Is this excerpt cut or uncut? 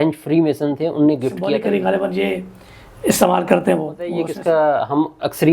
cut